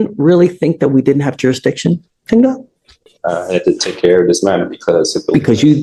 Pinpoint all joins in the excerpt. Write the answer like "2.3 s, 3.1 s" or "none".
none

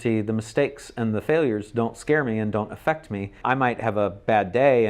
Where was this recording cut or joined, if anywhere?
3.4 s

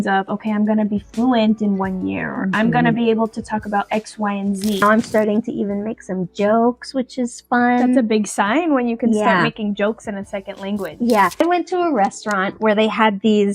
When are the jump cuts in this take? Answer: 4.8 s, 11.4 s

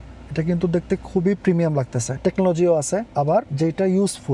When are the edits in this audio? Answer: 2.2 s, 3.3 s

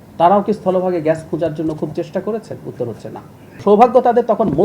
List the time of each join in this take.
3.6 s

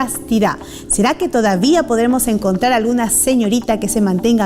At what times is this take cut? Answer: 2.2 s

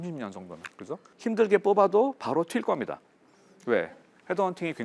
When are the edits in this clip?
1.1 s

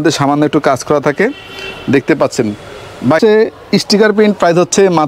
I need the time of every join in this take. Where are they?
3.2 s

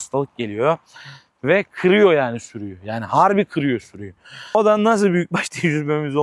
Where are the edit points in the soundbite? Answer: 4.5 s

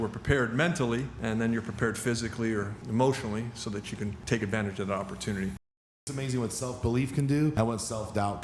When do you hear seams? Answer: 1.1 s, 2.8 s, 4.2 s, 5.9 s, 7.5 s

